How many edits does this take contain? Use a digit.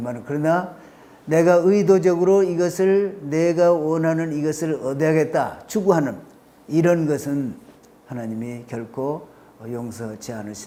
0